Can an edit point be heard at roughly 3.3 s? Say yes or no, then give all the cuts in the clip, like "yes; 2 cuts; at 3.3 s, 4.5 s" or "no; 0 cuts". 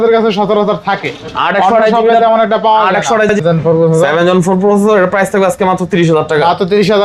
yes; 1 cut; at 3.3 s